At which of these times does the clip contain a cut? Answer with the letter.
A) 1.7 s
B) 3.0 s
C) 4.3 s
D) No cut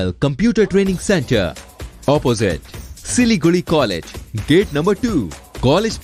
D